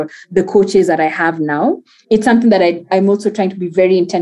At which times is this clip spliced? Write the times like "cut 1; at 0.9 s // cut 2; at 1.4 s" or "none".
cut 1; at 1.9 s // cut 2; at 2.8 s